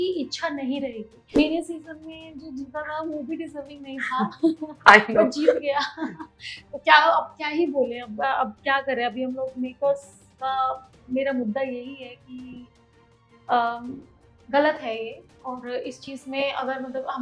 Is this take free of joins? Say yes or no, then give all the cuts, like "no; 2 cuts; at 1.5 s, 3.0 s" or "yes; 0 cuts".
no; 1 cut; at 1.2 s